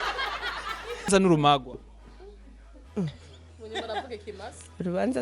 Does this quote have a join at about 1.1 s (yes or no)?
yes